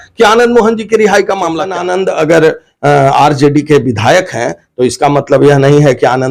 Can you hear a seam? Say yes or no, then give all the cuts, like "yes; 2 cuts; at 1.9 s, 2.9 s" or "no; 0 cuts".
yes; 1 cut; at 1.8 s